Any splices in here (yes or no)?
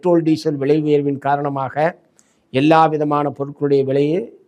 no